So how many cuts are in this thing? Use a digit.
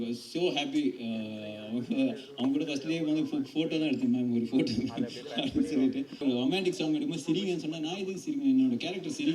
1